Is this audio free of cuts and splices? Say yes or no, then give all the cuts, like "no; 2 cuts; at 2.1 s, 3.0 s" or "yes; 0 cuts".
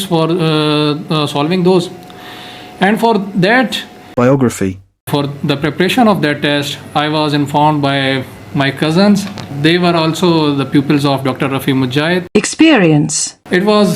no; 4 cuts; at 3.9 s, 4.9 s, 9.5 s, 12.3 s